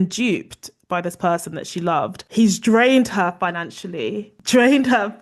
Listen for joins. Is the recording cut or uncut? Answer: cut